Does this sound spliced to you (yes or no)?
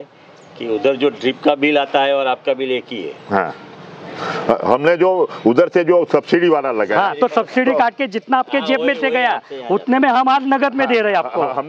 no